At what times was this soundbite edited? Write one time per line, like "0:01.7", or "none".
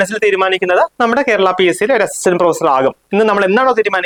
none